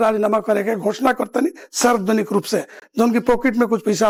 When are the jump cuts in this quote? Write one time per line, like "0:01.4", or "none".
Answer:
none